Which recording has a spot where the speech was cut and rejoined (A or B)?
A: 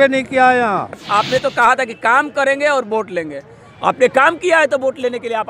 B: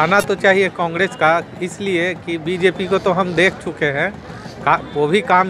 A